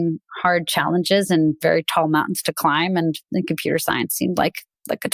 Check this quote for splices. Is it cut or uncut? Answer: uncut